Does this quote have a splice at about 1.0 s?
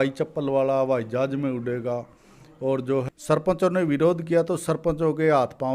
no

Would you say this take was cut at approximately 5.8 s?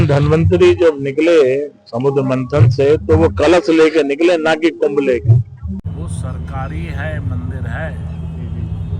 yes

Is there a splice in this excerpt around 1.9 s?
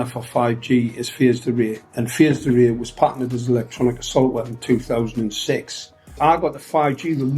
no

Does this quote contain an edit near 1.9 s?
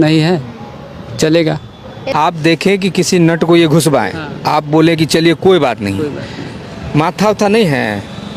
yes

